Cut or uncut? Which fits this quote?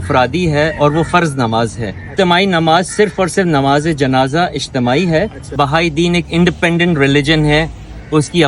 cut